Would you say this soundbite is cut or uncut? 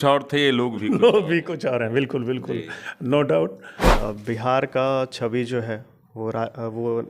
cut